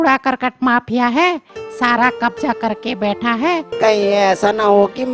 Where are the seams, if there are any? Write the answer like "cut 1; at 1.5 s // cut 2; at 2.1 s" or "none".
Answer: cut 1; at 3.7 s